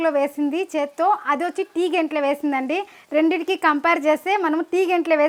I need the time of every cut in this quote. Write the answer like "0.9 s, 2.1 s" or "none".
none